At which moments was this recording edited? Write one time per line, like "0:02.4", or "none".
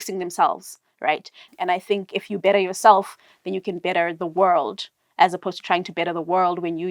0:01.4